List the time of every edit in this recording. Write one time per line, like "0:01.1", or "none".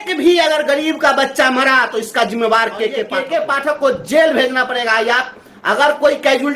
0:03.2